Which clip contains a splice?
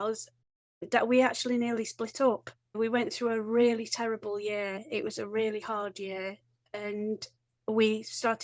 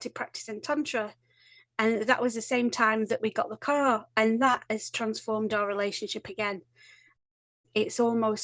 first; 1 cut; at 2.6 s

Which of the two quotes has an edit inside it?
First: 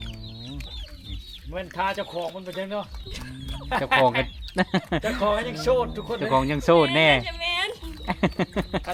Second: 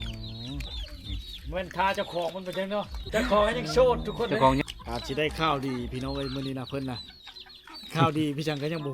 second; 2 cuts; at 3.1 s, 4.6 s

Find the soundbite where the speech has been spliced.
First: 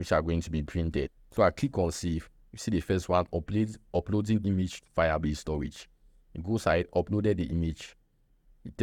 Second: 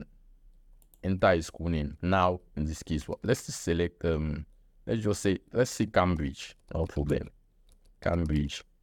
first; 1 cut; at 1.2 s

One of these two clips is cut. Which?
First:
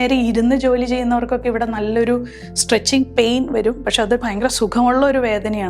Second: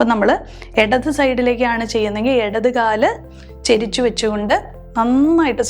second; 1 cut; at 4.8 s

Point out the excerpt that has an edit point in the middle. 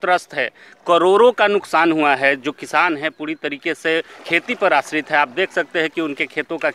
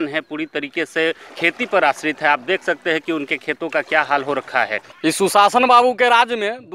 second; 1 cut; at 4.8 s

